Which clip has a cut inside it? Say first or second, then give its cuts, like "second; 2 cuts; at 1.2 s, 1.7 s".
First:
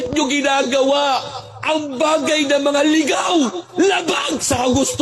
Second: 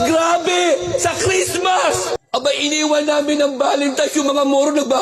second; 1 cut; at 2.2 s